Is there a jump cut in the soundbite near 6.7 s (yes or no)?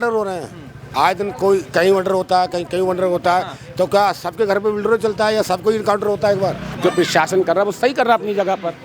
yes